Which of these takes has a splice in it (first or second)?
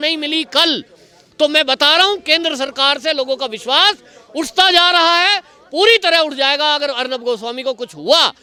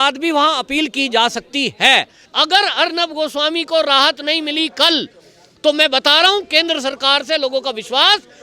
second